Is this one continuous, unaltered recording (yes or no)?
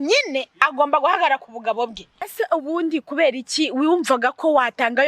no